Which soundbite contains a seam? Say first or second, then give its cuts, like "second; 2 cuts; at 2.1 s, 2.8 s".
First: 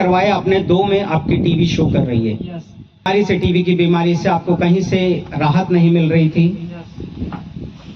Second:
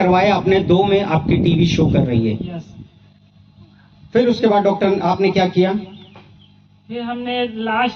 first; 1 cut; at 3.1 s